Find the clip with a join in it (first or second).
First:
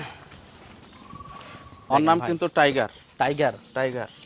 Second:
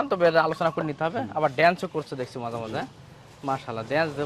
first